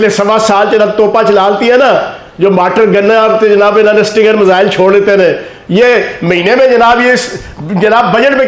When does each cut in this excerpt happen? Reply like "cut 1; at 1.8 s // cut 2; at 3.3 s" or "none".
none